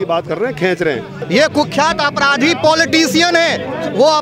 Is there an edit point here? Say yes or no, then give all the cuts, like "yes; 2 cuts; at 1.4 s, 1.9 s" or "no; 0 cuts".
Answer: yes; 1 cut; at 1.1 s